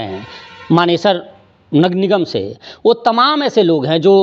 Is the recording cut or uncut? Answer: uncut